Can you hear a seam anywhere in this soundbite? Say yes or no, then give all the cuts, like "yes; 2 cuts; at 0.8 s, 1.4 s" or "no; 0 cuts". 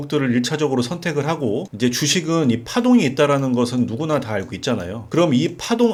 no; 0 cuts